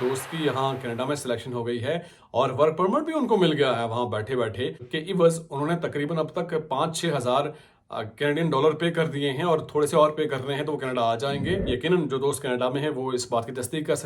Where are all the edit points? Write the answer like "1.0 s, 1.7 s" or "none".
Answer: 4.9 s, 11.7 s